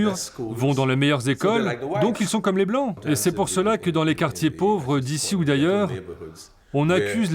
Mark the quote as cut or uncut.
cut